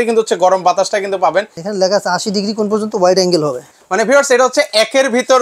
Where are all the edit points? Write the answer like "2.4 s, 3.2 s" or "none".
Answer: 1.6 s, 3.7 s